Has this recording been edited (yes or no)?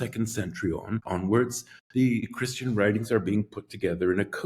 yes